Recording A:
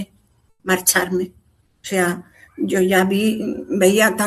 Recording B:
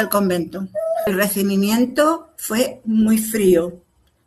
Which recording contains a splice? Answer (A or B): B